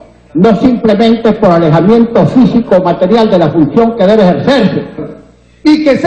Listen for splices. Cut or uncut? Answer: cut